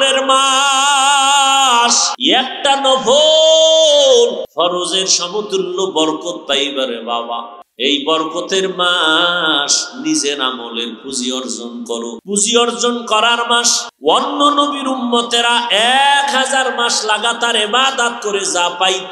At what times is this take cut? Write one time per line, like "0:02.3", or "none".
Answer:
0:02.1
0:04.4
0:07.6
0:12.2
0:13.8